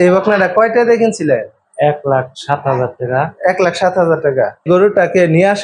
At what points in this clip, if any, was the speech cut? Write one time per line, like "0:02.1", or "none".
0:04.6

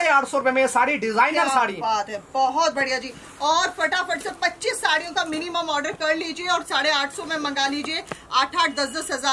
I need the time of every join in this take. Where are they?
none

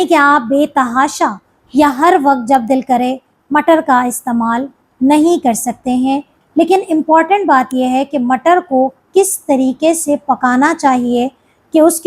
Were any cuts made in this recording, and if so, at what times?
0:06.4

